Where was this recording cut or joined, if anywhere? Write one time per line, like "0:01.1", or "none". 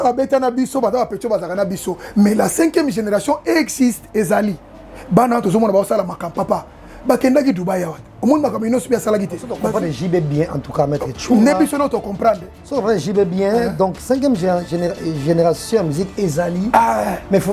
0:09.6